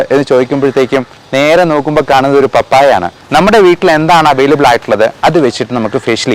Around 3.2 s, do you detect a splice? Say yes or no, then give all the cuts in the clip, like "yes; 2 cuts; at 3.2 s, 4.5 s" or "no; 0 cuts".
yes; 1 cut; at 3.2 s